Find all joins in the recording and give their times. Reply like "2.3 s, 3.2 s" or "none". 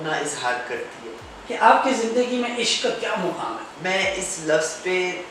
1.3 s, 3.7 s